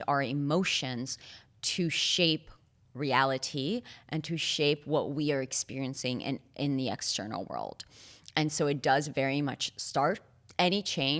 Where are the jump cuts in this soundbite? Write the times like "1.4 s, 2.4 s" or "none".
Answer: none

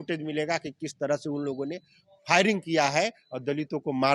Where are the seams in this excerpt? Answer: none

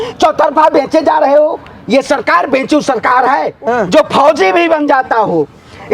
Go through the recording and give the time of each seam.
3.6 s

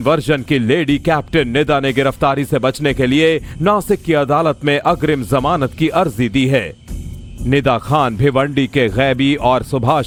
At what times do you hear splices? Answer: none

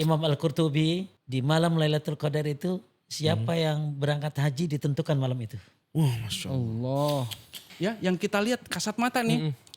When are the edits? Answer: 1.2 s, 7.7 s

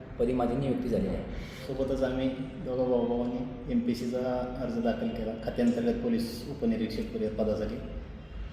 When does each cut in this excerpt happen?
1.7 s

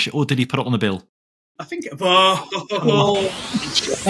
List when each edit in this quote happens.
none

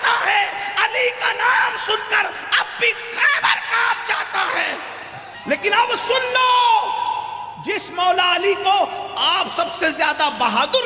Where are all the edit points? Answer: 5.2 s

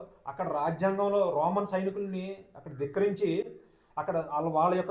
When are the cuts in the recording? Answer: none

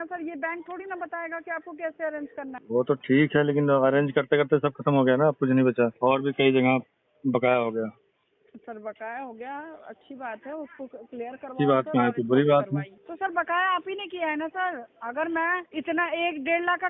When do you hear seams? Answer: 2.6 s, 5.9 s, 13.0 s, 15.7 s

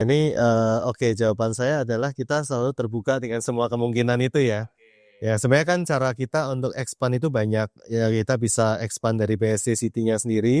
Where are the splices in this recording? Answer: none

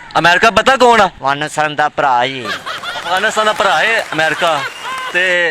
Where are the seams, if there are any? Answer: 1.2 s

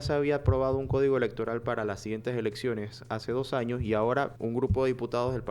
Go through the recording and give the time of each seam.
4.3 s

